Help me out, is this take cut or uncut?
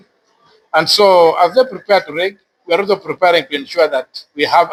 uncut